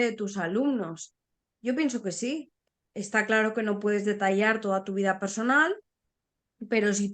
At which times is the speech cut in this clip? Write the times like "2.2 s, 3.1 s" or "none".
2.7 s